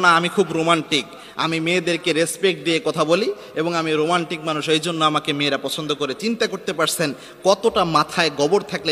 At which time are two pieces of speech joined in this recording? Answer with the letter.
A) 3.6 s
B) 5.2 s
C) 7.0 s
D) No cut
D